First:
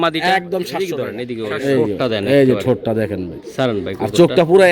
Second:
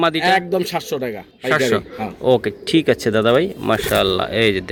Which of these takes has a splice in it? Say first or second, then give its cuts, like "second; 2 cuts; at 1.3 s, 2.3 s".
first; 1 cut; at 1.2 s